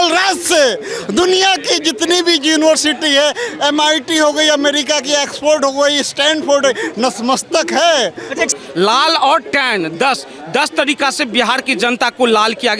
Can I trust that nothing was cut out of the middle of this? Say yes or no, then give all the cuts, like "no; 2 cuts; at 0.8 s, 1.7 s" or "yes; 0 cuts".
no; 1 cut; at 8.5 s